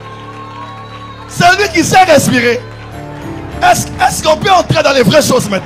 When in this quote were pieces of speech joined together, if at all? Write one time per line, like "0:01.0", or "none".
none